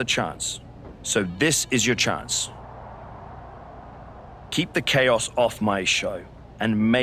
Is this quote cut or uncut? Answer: cut